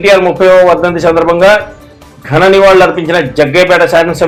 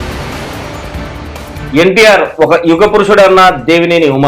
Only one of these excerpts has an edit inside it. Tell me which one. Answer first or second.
second